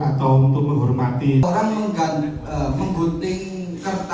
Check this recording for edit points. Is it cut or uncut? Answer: cut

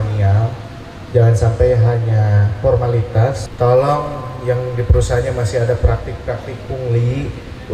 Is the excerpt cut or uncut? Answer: cut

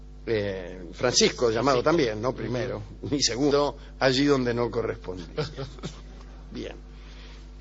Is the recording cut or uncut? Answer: uncut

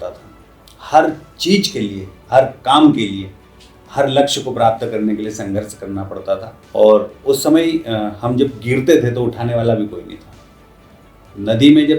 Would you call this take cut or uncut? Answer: cut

